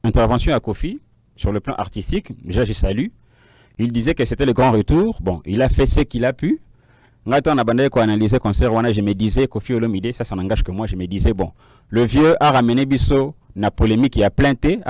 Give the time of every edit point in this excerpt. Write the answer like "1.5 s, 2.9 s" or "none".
none